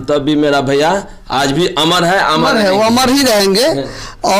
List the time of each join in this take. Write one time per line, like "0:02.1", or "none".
none